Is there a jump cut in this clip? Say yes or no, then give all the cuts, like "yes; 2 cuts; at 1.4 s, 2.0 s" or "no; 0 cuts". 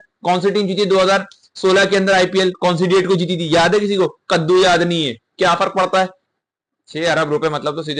yes; 1 cut; at 6.2 s